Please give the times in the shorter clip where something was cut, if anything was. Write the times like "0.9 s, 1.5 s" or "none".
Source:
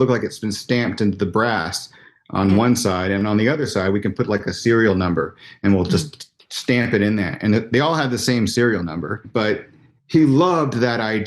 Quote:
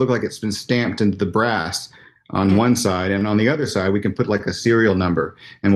none

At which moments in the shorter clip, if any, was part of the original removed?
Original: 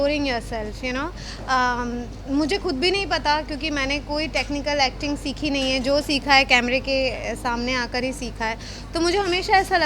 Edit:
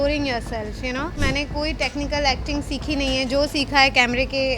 1.2 s

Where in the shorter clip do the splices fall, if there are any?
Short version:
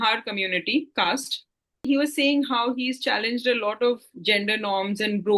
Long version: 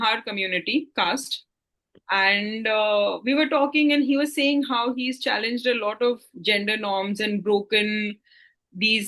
1.9 s

